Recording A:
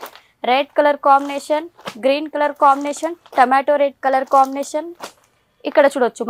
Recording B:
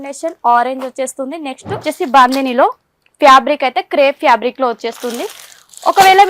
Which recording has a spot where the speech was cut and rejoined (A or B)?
B